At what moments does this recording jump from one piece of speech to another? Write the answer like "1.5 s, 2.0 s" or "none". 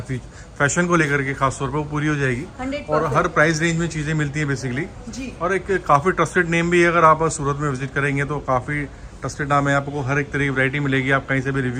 none